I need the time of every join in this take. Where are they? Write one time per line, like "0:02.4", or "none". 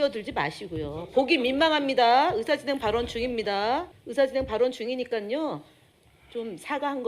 0:04.0